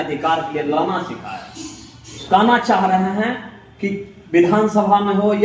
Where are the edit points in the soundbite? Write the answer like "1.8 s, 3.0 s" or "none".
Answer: 2.2 s